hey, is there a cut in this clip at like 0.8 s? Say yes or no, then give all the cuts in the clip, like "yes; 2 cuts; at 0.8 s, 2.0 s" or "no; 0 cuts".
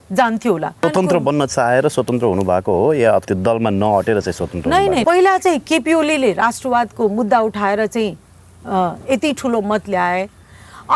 yes; 3 cuts; at 0.8 s, 3.2 s, 5.0 s